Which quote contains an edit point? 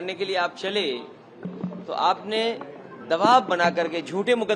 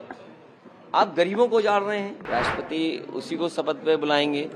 second; 1 cut; at 2.2 s

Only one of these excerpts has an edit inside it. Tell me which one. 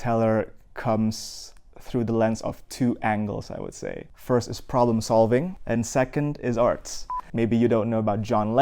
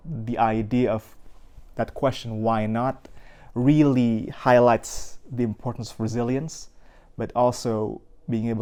first; 3 cuts; at 4.1 s, 5.6 s, 7.2 s

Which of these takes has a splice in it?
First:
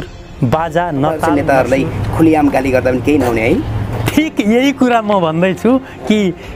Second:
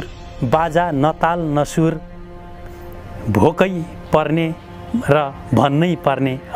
first; 1 cut; at 1.2 s

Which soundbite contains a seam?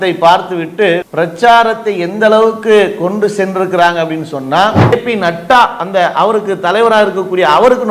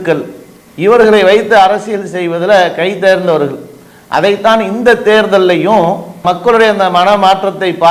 first; 1 cut; at 4.9 s

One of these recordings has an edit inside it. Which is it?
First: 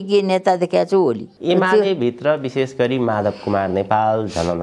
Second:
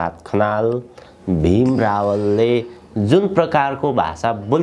first; 1 cut; at 1.3 s

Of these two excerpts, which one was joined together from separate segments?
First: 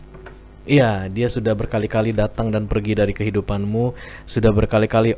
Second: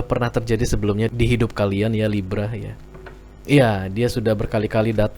second; 1 cut; at 1.1 s

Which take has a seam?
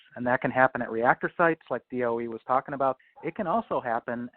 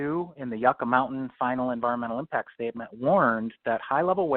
first; 1 cut; at 3.0 s

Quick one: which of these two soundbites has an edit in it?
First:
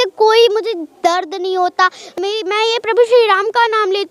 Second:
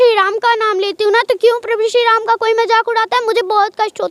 first; 1 cut; at 2.1 s

